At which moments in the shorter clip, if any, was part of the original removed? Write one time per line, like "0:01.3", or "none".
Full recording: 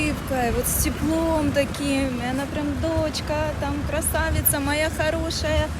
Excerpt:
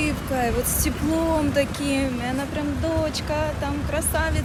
none